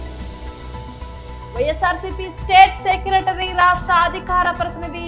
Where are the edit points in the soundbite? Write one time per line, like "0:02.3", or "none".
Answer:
0:01.6

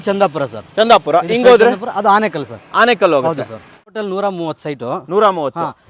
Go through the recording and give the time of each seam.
0:03.8

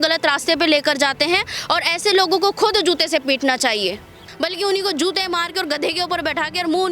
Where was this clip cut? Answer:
0:04.2

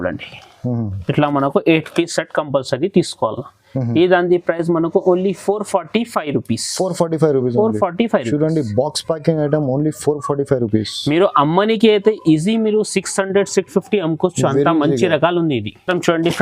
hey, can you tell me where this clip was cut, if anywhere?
none

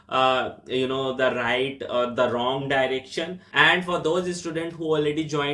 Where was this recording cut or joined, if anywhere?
0:03.4

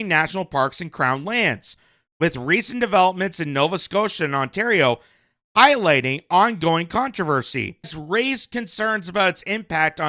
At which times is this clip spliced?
0:08.0

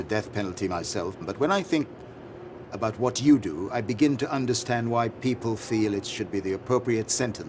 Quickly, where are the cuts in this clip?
0:01.2

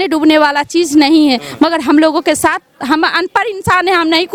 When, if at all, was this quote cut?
none

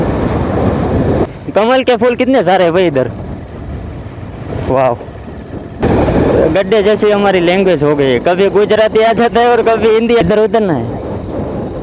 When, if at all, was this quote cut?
0:01.3
0:05.8
0:10.2

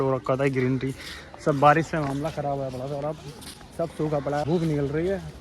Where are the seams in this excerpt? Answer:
0:04.4

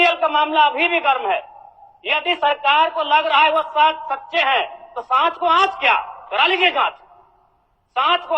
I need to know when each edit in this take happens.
none

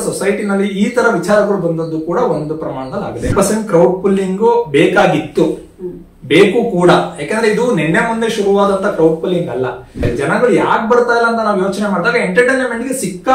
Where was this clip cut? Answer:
0:03.3
0:10.0

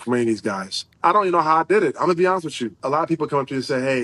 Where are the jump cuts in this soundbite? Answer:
0:01.0
0:02.8

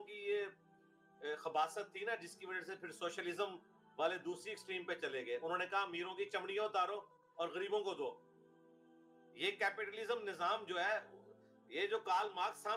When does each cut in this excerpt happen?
none

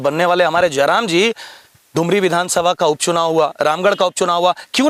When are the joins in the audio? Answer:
none

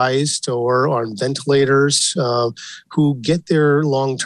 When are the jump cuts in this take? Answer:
none

